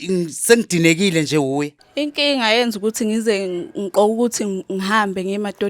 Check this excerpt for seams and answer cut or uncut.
cut